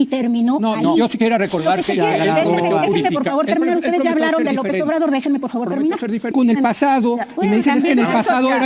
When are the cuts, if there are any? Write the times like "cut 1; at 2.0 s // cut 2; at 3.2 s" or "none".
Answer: cut 1; at 6.3 s